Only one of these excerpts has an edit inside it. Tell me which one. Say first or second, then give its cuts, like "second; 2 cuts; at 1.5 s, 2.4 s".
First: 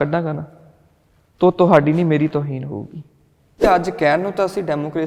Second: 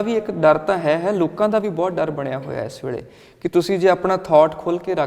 first; 1 cut; at 3.6 s